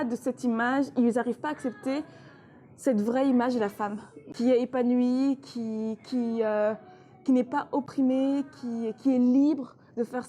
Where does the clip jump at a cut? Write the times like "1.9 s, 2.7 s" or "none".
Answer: 4.3 s, 7.9 s